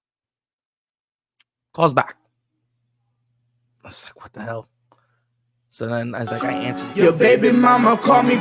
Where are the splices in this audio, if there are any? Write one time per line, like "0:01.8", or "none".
0:06.4